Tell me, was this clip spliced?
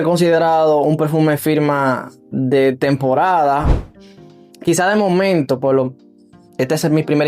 yes; 1 cut; at 3.9 s

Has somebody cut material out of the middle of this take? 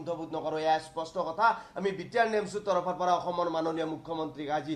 no; 0 cuts

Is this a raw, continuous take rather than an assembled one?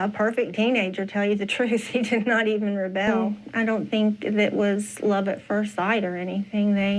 no; 1 cut; at 3.1 s

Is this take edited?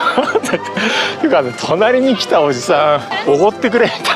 yes; 1 cut; at 3.1 s

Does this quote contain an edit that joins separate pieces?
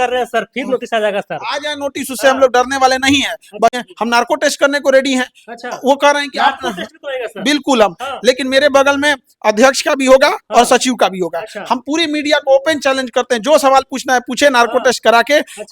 yes; 1 cut; at 3.7 s

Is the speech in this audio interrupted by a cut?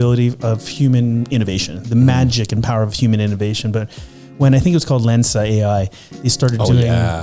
no; 0 cuts

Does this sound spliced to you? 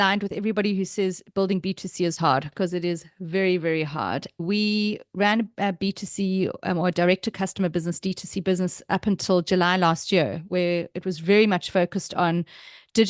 yes; 1 cut; at 4.4 s

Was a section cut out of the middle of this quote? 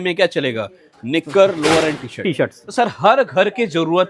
no; 0 cuts

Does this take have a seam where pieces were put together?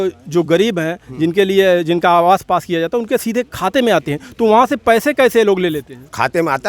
no; 0 cuts

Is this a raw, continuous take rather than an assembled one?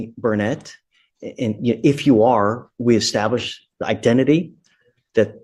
yes; 0 cuts

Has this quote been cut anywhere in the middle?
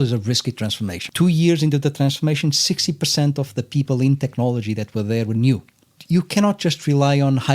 yes; 2 cuts; at 1.1 s, 6.0 s

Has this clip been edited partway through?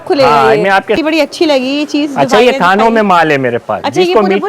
yes; 1 cut; at 1.0 s

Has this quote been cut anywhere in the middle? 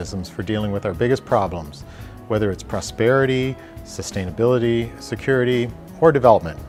no; 0 cuts

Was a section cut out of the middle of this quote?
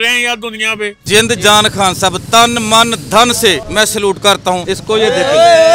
yes; 3 cuts; at 1.0 s, 3.6 s, 4.6 s

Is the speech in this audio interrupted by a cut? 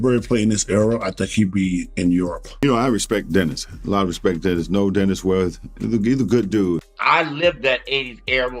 yes; 2 cuts; at 2.6 s, 6.9 s

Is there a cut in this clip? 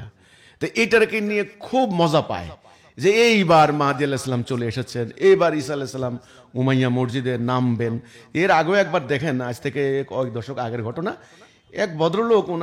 no; 0 cuts

